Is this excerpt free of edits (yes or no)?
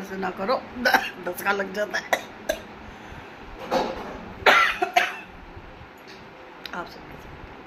yes